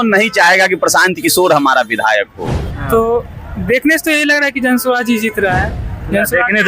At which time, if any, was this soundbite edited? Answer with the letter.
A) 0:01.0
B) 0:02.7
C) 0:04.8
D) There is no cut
B